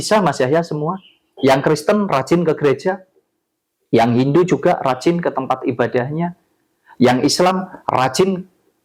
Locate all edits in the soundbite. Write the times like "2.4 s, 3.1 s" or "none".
none